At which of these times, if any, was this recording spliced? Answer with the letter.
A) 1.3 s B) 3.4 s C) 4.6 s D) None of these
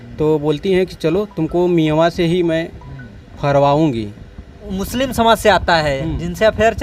C